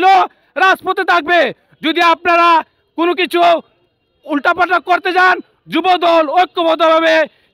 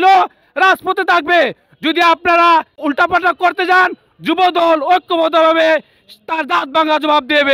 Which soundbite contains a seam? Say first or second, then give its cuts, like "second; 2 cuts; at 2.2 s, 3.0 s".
second; 1 cut; at 2.7 s